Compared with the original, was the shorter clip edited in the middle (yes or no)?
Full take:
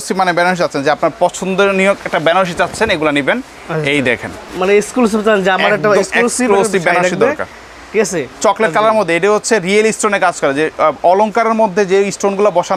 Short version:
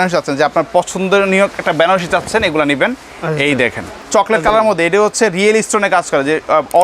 yes